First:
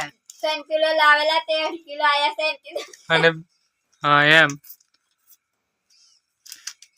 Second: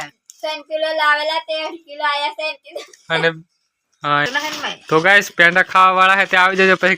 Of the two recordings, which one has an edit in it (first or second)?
second